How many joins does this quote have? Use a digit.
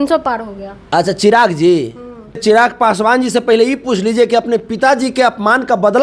1